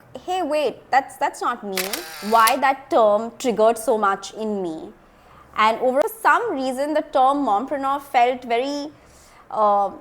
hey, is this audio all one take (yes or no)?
no